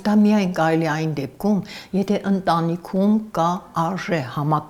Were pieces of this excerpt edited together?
no; 0 cuts

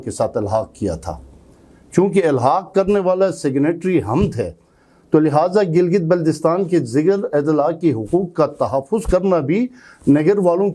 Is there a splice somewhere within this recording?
no; 0 cuts

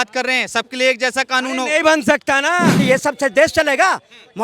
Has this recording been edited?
yes; 1 cut; at 2.8 s

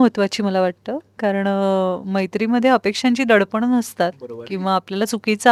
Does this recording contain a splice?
no; 0 cuts

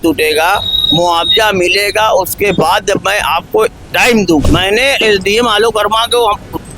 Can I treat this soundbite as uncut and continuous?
no; 1 cut; at 4.4 s

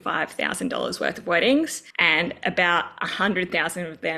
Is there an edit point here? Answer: yes; 1 cut; at 1.9 s

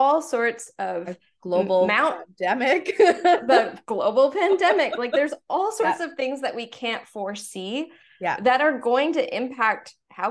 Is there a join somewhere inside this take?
no; 0 cuts

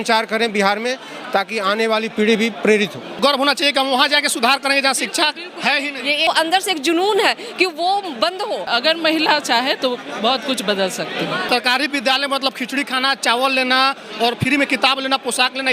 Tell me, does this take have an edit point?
yes; 4 cuts; at 3.1 s, 6.3 s, 8.7 s, 11.4 s

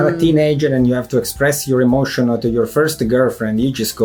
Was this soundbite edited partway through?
no; 0 cuts

